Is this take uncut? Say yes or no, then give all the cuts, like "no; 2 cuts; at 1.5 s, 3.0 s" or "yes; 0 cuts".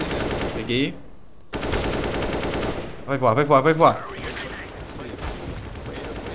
yes; 0 cuts